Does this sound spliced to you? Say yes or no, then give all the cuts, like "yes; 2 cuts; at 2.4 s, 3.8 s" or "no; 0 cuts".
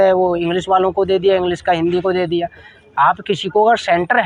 no; 0 cuts